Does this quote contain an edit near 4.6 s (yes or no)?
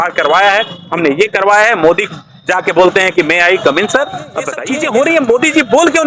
yes